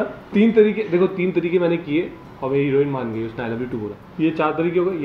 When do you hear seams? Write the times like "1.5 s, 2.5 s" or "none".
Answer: 4.0 s